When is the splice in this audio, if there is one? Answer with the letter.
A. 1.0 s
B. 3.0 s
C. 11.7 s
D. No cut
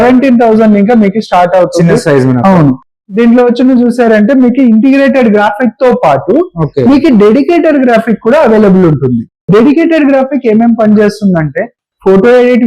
B